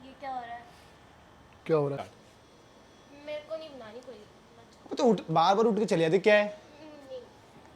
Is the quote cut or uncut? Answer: cut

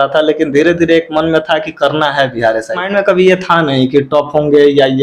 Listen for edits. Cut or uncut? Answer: cut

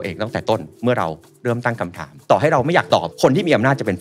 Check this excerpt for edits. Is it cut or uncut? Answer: cut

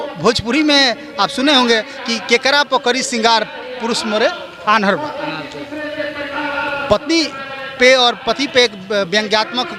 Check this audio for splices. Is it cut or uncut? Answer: uncut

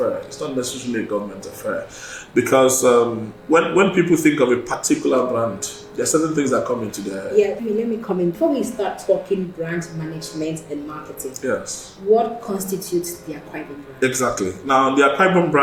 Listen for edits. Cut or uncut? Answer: uncut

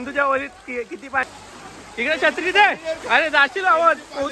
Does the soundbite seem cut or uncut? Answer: cut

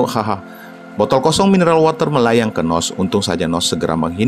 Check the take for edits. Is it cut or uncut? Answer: uncut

